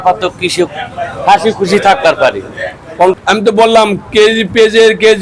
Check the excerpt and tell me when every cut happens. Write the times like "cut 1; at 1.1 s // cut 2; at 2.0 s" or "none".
cut 1; at 3.1 s